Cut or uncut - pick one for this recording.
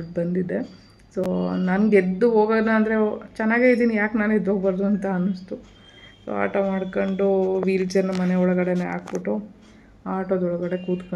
uncut